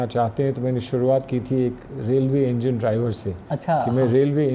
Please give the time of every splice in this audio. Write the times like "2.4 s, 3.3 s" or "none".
none